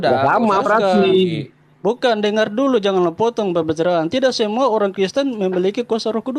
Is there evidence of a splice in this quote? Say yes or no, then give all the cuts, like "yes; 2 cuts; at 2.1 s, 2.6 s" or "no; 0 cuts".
no; 0 cuts